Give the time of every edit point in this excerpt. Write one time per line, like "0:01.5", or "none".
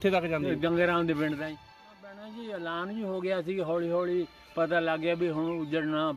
0:01.9